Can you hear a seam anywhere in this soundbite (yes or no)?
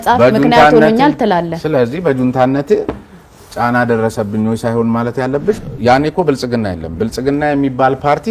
yes